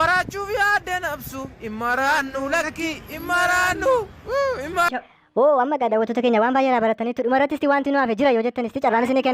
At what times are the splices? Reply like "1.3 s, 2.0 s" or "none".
4.9 s